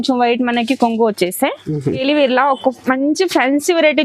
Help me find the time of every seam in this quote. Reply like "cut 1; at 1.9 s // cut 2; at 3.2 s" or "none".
cut 1; at 1.7 s

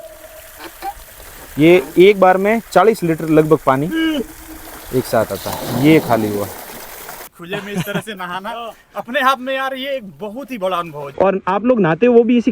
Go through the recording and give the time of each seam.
cut 1; at 7.3 s // cut 2; at 11.1 s

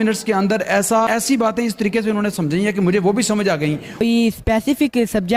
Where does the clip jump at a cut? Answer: cut 1; at 1.1 s // cut 2; at 4.0 s

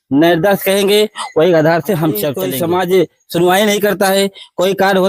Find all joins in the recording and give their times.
cut 1; at 2.4 s

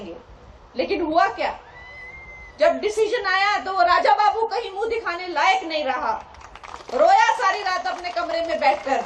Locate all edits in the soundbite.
none

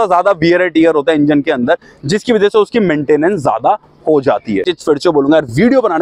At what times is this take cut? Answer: cut 1; at 4.7 s

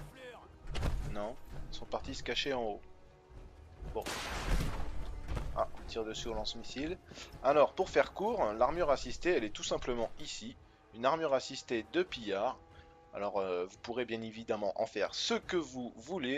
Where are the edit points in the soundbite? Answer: cut 1; at 14.2 s

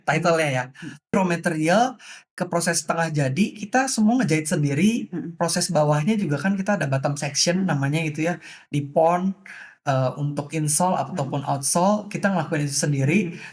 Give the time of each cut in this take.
cut 1; at 1.1 s

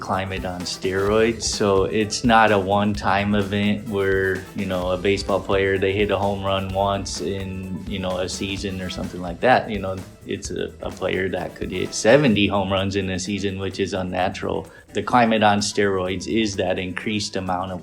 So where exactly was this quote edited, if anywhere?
cut 1; at 14.8 s

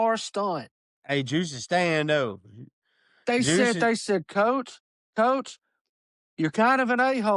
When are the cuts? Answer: none

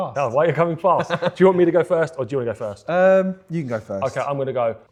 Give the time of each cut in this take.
none

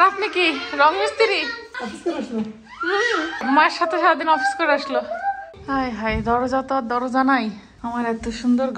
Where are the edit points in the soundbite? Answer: cut 1; at 1.7 s // cut 2; at 3.4 s // cut 3; at 5.4 s // cut 4; at 7.7 s

